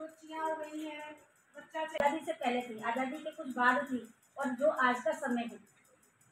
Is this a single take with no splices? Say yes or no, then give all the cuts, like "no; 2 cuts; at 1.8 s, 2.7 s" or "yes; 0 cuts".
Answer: no; 1 cut; at 2.0 s